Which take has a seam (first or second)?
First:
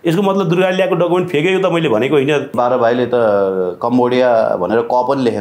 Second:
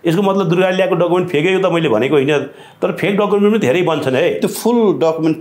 first